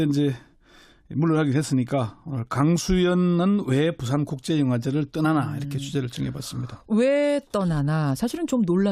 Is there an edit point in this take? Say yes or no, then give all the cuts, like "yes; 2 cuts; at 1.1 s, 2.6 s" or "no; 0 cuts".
no; 0 cuts